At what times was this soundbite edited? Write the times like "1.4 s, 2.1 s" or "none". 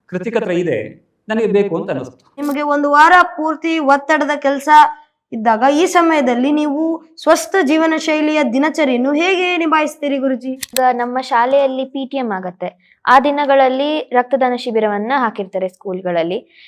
2.4 s, 10.7 s